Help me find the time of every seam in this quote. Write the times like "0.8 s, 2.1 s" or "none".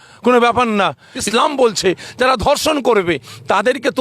1.3 s